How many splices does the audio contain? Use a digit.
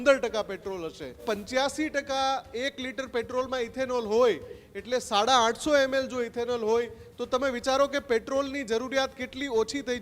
1